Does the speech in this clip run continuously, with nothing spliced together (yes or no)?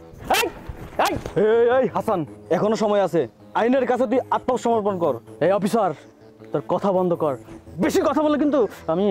no